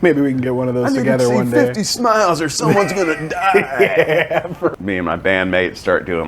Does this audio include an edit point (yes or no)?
yes